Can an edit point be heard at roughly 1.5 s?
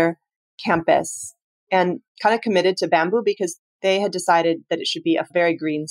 yes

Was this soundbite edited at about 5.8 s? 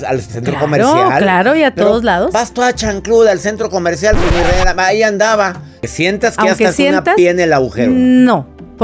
yes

